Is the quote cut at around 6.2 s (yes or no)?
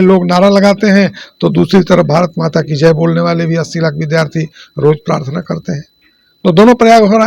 no